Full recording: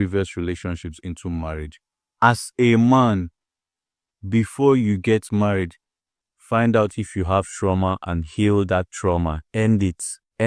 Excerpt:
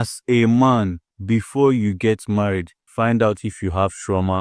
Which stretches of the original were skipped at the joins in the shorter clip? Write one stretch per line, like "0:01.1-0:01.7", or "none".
0:03.4-0:04.1
0:05.8-0:06.3